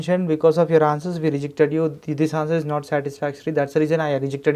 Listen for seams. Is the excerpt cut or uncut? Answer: uncut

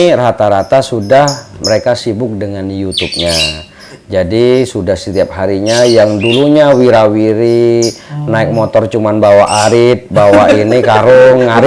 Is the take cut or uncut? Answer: uncut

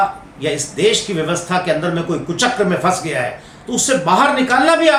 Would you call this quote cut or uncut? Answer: uncut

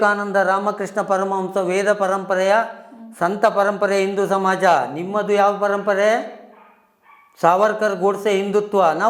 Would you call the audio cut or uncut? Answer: uncut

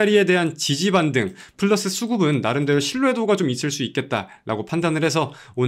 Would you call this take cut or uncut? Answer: uncut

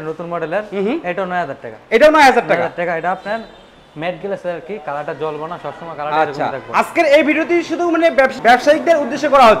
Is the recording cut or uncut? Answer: uncut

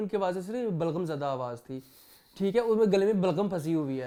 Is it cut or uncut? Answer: uncut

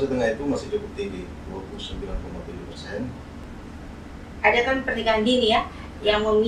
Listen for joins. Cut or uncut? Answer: cut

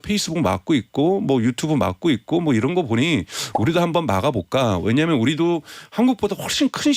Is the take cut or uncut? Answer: uncut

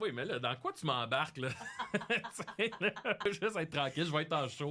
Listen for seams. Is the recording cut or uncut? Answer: cut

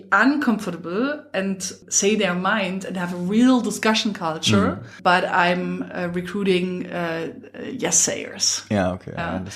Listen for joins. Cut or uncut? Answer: cut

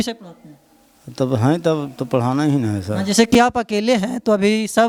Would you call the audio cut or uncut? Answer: uncut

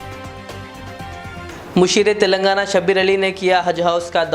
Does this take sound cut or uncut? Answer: cut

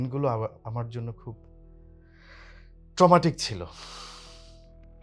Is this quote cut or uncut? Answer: uncut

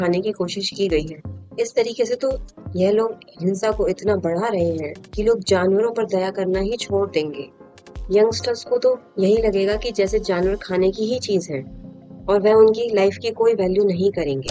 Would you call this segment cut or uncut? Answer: uncut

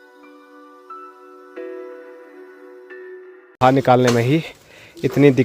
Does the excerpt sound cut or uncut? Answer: cut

